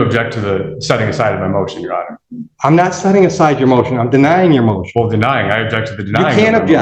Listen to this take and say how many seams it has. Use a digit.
0